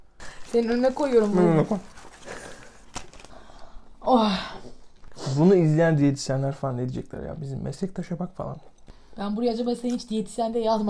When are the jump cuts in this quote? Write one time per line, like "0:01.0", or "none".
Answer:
0:09.1